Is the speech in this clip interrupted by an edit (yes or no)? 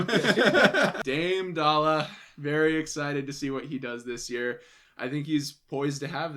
yes